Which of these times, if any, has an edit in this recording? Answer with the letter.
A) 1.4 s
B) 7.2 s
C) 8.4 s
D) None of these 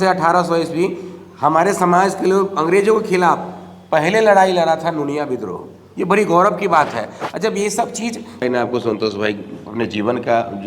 C